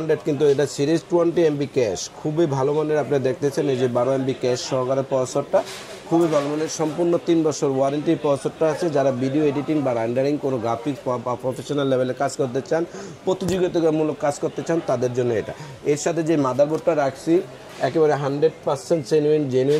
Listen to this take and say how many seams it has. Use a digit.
0